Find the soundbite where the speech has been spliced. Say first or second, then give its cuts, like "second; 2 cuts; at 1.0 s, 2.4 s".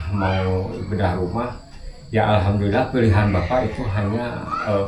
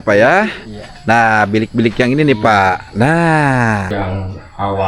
second; 1 cut; at 3.9 s